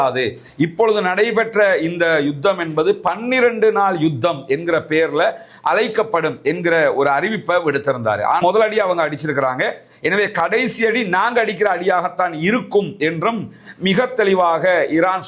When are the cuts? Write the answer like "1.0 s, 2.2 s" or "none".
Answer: 8.4 s